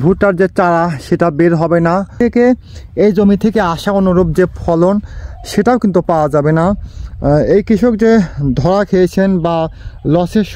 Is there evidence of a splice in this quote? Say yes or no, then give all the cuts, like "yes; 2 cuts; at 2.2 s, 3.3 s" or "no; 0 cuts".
yes; 1 cut; at 2.2 s